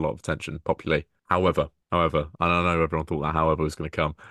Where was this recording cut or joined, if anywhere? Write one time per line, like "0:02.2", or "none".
0:01.1
0:01.8